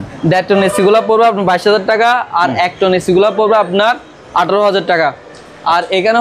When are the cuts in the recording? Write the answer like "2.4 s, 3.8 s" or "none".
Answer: none